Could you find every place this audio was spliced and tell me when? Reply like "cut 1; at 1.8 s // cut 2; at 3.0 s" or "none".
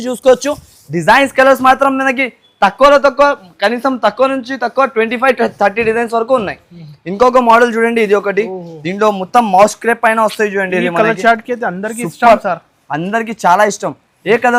none